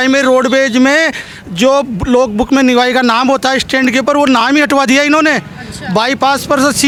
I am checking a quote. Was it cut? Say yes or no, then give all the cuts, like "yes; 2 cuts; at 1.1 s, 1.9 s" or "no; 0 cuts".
no; 0 cuts